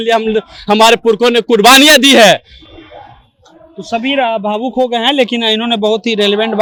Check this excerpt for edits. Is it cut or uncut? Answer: uncut